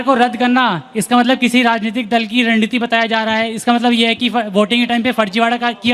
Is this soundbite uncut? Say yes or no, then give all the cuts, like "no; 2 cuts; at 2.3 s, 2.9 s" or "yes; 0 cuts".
yes; 0 cuts